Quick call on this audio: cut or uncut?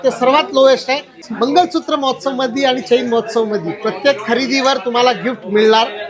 cut